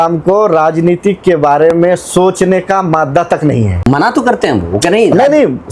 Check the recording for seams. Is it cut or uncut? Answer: cut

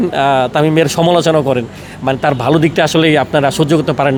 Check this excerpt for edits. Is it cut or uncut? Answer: uncut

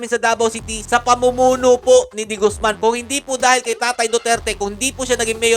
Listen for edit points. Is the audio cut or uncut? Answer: cut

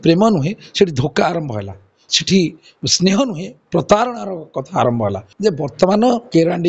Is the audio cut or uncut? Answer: cut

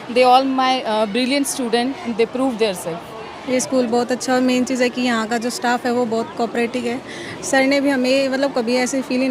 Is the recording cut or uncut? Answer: cut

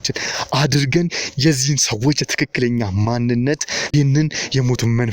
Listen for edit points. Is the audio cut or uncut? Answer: cut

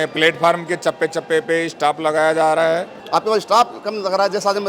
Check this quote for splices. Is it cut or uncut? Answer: cut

